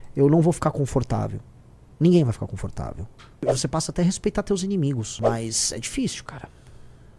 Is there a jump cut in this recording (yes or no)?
yes